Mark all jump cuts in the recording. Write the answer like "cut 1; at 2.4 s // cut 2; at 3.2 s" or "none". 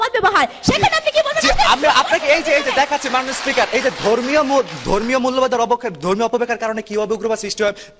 none